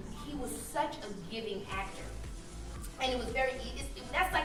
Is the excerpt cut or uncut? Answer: uncut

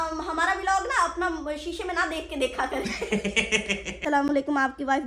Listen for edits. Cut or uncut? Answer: cut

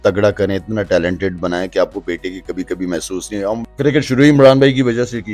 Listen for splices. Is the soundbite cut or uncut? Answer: cut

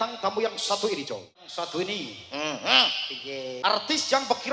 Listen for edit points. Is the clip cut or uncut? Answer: cut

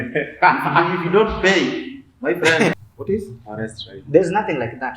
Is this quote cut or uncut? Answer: cut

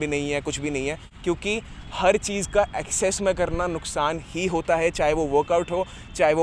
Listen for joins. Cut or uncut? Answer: uncut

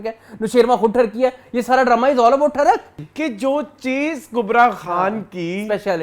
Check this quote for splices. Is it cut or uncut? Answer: cut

